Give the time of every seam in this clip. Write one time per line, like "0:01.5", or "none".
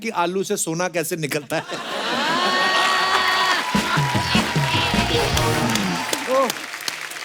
none